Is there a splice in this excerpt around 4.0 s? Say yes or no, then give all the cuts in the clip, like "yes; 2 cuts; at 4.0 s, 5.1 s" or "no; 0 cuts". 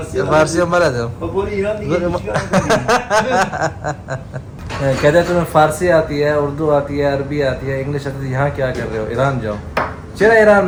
no; 0 cuts